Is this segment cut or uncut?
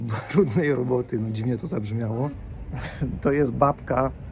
cut